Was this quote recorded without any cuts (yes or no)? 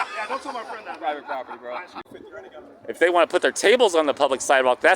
no